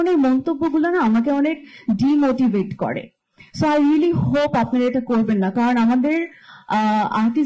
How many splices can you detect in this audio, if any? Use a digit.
0